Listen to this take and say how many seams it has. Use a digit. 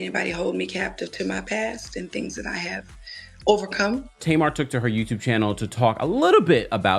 1